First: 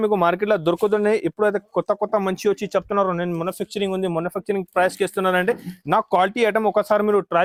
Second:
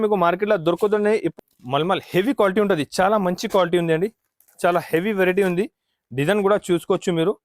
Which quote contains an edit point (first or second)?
second